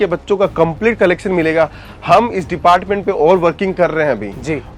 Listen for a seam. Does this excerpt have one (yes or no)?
no